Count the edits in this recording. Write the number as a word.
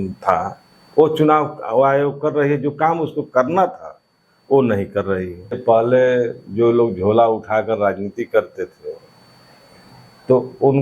one